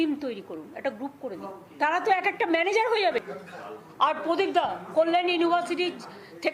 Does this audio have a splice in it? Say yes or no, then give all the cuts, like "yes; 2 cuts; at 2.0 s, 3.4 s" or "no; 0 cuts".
yes; 2 cuts; at 1.5 s, 3.4 s